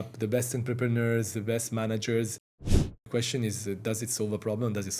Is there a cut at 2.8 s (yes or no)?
yes